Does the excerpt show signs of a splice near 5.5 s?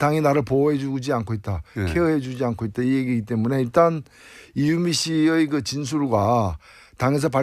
yes; 1 cut; at 5.5 s

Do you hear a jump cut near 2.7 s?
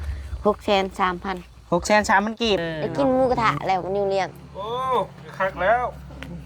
yes; 1 cut; at 2.7 s

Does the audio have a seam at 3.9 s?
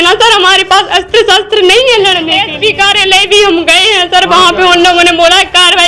no; 1 cut; at 2.4 s

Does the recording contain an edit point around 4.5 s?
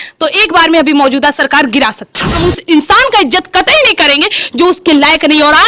no; 1 cut; at 2.4 s

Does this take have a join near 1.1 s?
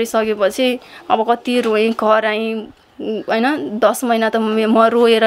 no; 0 cuts

